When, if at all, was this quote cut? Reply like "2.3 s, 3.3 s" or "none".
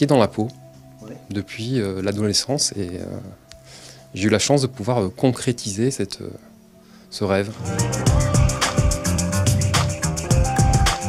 1.5 s